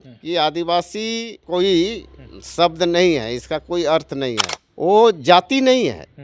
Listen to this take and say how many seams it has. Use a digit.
2